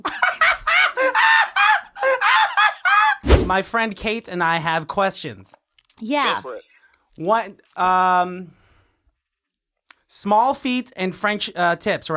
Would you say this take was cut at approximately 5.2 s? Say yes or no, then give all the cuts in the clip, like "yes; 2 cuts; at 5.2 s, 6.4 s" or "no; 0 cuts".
no; 1 cut; at 3.4 s